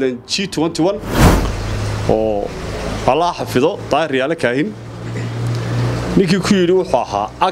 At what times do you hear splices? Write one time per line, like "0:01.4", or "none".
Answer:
0:01.2